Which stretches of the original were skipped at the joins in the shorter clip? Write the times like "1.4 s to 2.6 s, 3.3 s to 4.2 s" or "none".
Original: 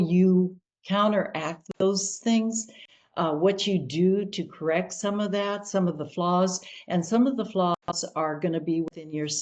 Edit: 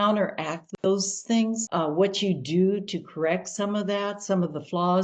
2.6 s to 3.1 s